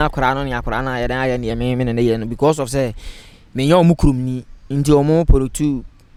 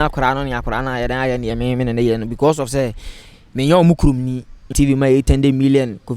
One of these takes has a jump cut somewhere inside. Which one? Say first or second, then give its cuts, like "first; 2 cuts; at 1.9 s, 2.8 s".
second; 1 cut; at 4.6 s